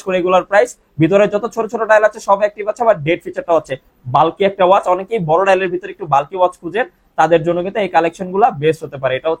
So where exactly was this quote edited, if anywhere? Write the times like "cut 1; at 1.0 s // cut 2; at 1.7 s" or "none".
none